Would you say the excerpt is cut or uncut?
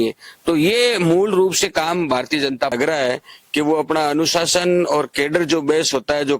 cut